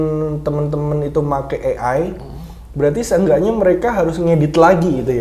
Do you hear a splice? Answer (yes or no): no